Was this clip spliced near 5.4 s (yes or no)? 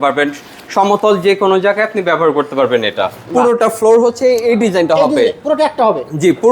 no